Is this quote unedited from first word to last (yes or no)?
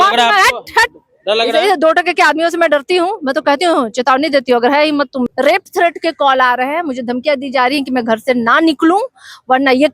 no